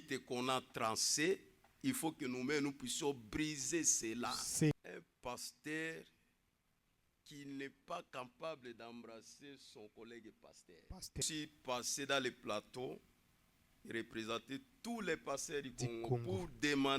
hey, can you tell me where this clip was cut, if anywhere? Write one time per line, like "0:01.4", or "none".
0:04.7
0:11.2